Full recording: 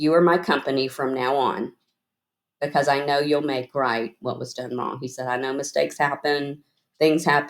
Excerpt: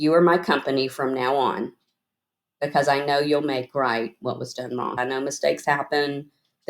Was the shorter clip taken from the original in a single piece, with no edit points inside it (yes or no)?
no